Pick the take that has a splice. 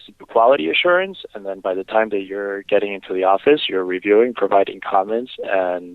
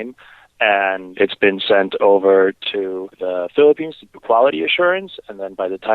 second; 2 cuts; at 1.1 s, 2.6 s

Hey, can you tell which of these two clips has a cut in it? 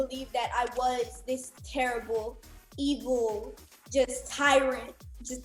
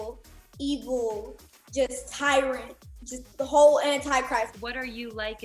second; 1 cut; at 4.5 s

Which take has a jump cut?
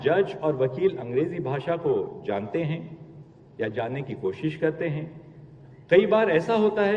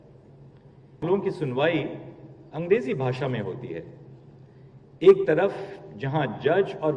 second; 1 cut; at 1.0 s

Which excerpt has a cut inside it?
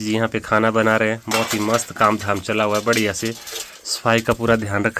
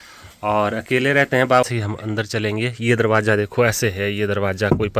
second; 1 cut; at 1.6 s

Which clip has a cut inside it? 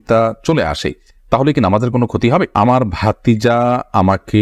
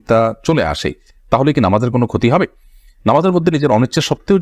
first; 1 cut; at 2.5 s

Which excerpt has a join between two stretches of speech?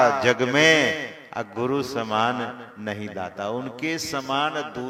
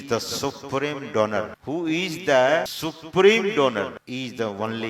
second; 3 cuts; at 1.6 s, 2.7 s, 4.0 s

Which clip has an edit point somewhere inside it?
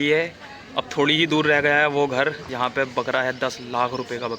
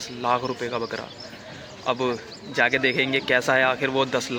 first; 1 cut; at 2.5 s

